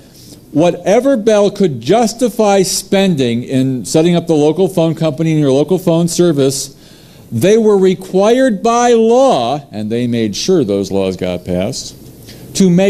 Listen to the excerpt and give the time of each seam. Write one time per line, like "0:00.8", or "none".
0:01.7